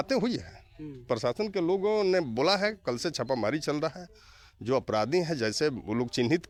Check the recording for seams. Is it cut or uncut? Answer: uncut